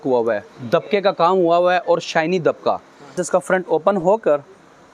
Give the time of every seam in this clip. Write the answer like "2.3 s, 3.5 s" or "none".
3.1 s